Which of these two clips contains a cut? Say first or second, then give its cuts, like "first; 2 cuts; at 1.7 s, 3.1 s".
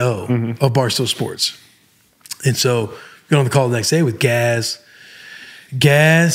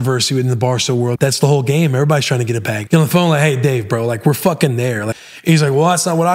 second; 3 cuts; at 1.2 s, 2.8 s, 5.1 s